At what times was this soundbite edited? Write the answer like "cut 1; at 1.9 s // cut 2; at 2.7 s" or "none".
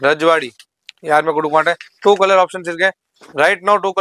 none